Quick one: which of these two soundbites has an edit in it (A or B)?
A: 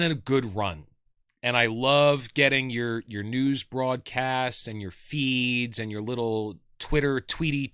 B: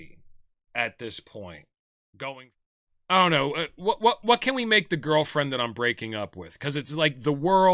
B